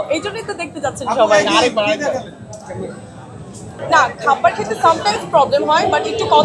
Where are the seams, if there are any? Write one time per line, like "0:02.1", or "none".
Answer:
0:03.7